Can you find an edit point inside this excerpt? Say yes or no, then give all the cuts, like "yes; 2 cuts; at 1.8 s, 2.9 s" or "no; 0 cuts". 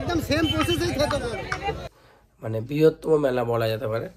yes; 1 cut; at 1.9 s